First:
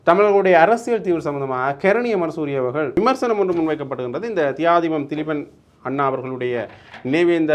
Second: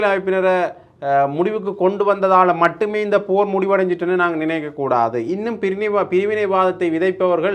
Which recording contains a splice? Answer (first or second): first